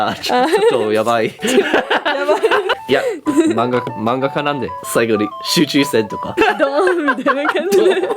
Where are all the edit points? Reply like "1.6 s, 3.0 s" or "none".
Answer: 2.7 s, 4.7 s, 6.3 s

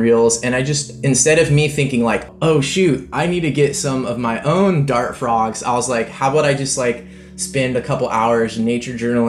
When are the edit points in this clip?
none

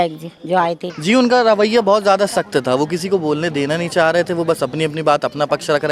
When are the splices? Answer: 0.9 s

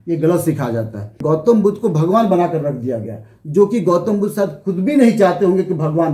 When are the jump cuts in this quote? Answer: 1.2 s

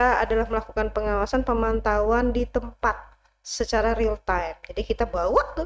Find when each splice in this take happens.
none

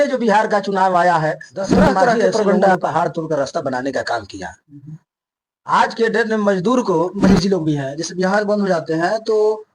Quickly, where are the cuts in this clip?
2.7 s, 7.1 s

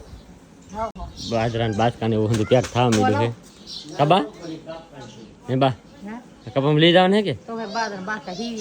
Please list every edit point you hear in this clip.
none

